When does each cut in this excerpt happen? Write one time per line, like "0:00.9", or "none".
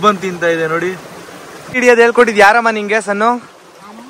0:01.5